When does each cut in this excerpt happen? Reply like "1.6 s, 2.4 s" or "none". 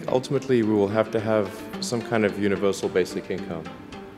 none